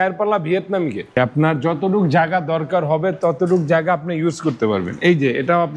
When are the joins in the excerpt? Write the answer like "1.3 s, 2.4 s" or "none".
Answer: 1.2 s

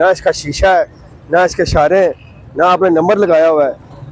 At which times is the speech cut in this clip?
none

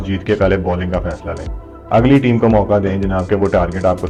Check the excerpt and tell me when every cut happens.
none

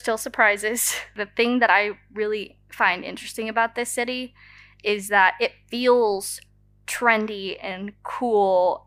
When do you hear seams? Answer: 1.1 s

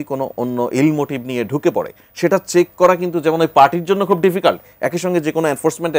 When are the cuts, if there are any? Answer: none

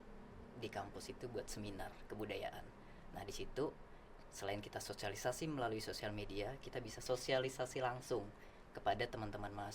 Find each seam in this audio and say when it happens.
7.0 s

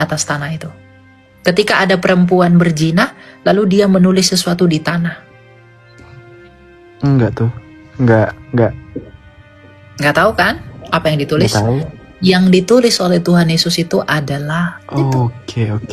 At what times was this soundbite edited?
14.8 s

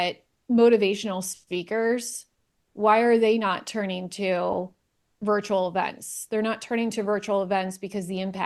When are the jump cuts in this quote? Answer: none

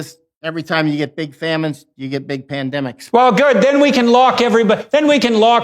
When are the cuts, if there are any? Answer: 3.0 s

